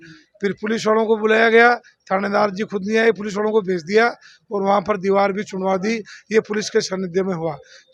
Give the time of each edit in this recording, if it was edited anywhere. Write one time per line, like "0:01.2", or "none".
none